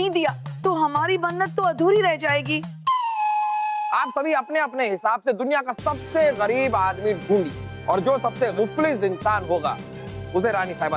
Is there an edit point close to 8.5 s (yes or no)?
yes